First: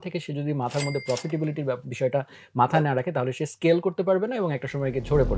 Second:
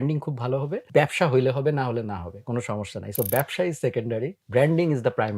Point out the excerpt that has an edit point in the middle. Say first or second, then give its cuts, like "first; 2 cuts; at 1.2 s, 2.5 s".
second; 2 cuts; at 0.8 s, 4.4 s